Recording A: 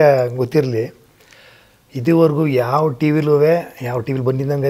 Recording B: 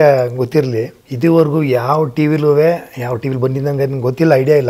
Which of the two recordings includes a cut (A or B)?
B